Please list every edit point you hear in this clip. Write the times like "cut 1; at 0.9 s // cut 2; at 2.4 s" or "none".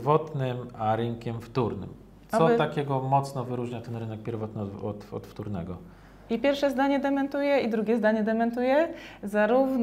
none

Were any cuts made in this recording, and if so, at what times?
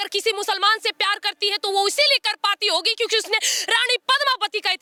none

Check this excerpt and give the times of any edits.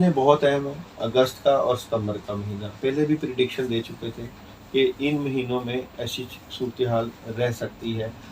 none

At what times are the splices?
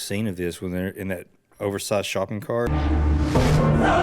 cut 1; at 2.7 s

